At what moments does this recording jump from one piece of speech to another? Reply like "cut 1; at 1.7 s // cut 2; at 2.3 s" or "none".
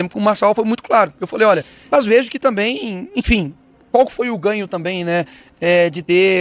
cut 1; at 1.7 s